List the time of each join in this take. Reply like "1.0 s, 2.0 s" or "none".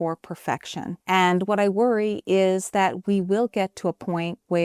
1.0 s